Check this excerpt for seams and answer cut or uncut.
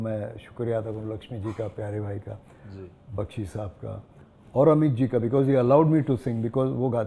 uncut